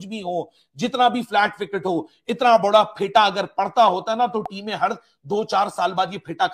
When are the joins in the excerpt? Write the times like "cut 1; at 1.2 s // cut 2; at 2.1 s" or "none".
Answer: none